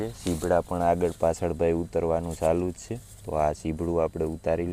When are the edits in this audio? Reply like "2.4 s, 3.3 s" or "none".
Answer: none